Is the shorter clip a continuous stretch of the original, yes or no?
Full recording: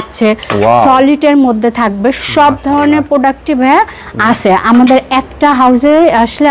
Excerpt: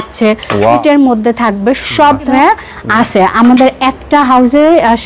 no